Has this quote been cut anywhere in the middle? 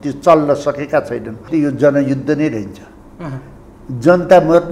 yes; 1 cut; at 1.4 s

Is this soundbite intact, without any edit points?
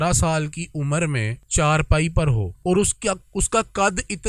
no; 2 cuts; at 1.4 s, 2.5 s

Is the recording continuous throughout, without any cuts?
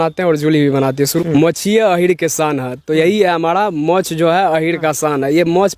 no; 1 cut; at 1.2 s

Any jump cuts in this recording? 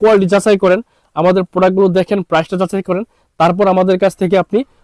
no; 0 cuts

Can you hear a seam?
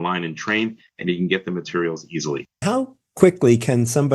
yes; 1 cut; at 2.6 s

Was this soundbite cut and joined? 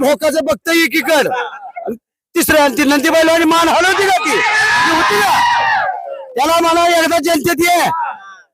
no; 0 cuts

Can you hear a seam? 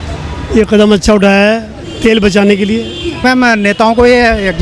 yes; 1 cut; at 3.2 s

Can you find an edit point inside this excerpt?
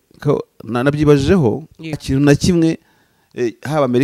yes; 1 cut; at 2.0 s

